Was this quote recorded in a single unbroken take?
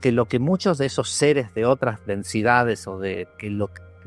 yes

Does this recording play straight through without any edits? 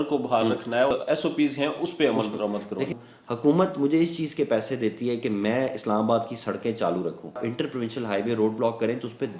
no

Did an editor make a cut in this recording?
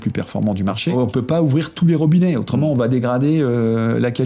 yes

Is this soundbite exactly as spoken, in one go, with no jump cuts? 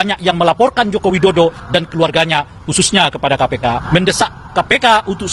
no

